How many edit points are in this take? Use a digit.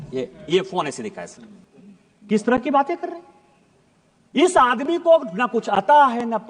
1